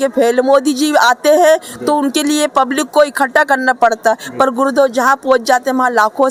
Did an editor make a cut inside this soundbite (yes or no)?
no